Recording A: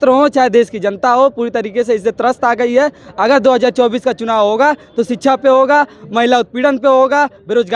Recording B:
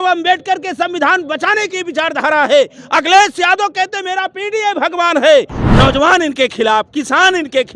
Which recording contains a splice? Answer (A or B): B